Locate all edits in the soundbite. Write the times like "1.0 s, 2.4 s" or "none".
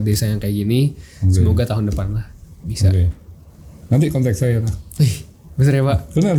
none

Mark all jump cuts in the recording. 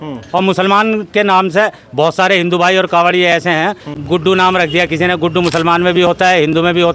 4.0 s

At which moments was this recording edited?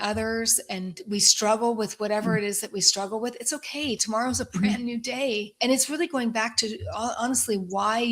1.0 s, 5.5 s

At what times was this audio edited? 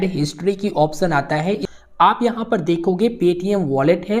1.7 s

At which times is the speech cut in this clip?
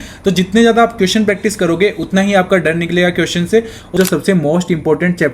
4.0 s

